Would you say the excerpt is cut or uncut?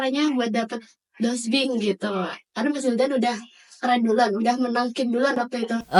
uncut